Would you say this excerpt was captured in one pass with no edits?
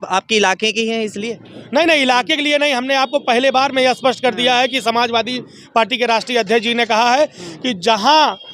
yes; 0 cuts

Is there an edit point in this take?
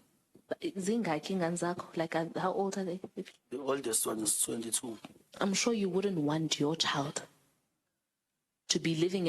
yes; 2 cuts; at 3.2 s, 5.3 s

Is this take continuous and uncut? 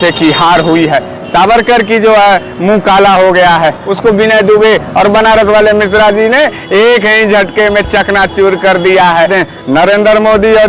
no; 2 cuts; at 3.8 s, 9.3 s

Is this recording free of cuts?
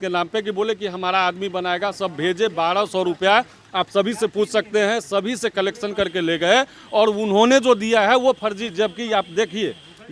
yes; 0 cuts

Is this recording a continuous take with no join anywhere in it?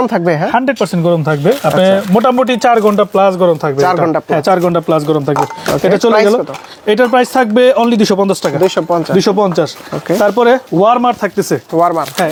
yes; 0 cuts

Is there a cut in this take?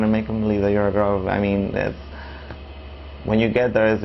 no; 0 cuts

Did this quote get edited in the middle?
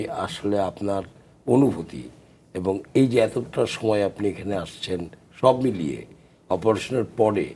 no; 0 cuts

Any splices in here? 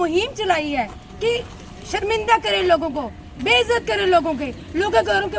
no; 0 cuts

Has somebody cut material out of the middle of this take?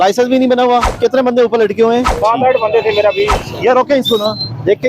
yes; 3 cuts; at 0.9 s, 2.1 s, 3.4 s

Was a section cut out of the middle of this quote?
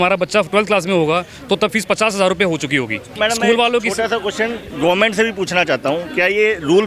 yes; 1 cut; at 3.1 s

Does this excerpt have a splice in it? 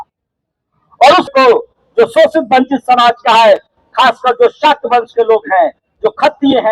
yes; 1 cut; at 1.3 s

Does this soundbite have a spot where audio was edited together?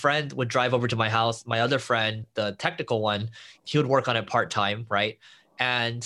no; 0 cuts

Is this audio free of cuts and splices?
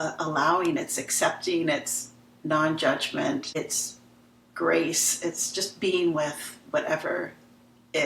no; 1 cut; at 3.5 s

